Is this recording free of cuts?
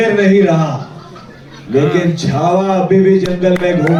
yes; 0 cuts

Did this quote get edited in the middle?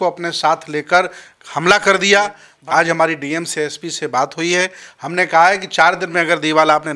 yes; 1 cut; at 2.5 s

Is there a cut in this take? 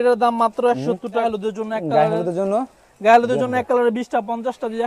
yes; 1 cut; at 1.2 s

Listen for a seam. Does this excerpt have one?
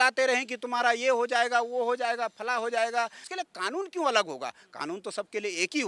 yes; 1 cut; at 3.1 s

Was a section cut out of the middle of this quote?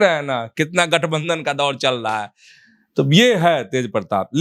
no; 0 cuts

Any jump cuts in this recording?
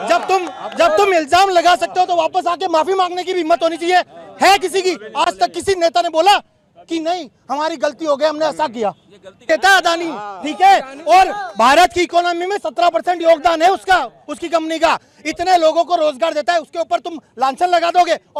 no; 0 cuts

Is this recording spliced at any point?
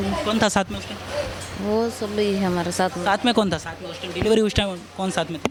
no; 0 cuts

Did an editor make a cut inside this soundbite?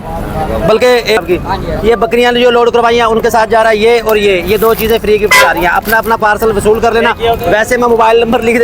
yes; 1 cut; at 1.2 s

